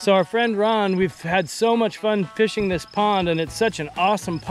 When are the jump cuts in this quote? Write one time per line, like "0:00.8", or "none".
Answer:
none